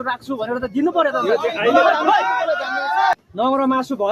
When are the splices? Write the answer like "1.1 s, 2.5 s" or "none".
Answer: 3.1 s